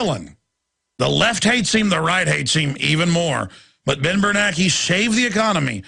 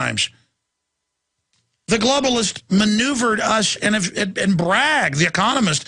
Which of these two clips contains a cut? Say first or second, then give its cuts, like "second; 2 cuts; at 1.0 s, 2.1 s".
second; 1 cut; at 4.1 s